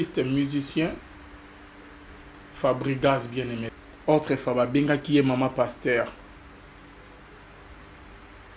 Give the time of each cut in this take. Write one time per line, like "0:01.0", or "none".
0:03.6